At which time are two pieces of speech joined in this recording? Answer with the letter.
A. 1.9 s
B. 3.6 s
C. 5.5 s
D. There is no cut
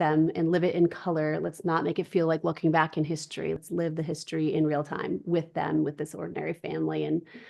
B